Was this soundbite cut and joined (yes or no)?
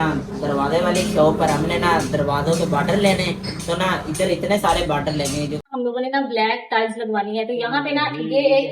yes